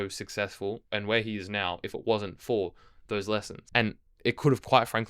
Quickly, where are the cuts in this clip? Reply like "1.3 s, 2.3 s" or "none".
0.8 s, 3.6 s